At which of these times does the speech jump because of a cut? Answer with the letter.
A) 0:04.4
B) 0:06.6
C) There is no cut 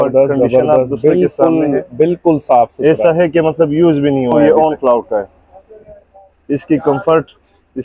A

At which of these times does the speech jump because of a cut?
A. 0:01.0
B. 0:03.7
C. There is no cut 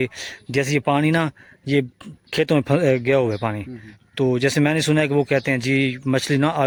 C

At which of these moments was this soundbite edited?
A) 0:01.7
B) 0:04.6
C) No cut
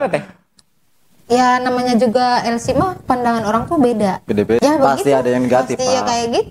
B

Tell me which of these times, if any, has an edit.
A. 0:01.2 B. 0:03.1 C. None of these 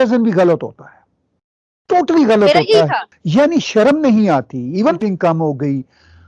B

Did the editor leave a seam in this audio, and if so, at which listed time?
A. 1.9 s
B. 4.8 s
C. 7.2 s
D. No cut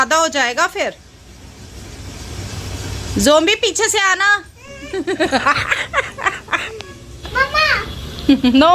C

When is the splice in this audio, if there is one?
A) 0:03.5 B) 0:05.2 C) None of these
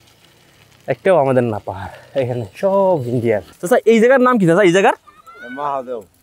A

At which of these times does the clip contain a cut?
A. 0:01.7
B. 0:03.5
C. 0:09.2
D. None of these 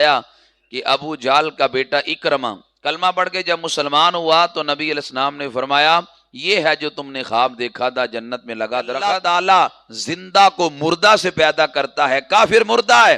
C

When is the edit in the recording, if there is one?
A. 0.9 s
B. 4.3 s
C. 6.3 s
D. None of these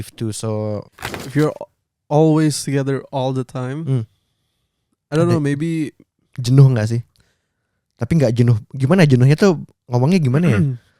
A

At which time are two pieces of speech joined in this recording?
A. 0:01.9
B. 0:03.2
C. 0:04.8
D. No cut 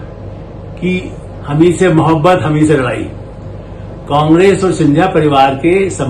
D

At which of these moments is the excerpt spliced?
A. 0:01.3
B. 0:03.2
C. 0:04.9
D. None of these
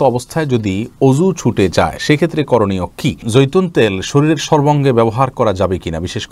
B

